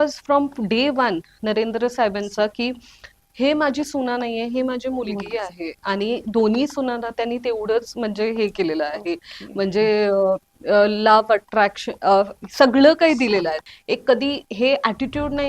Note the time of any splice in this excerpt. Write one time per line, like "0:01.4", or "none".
0:13.6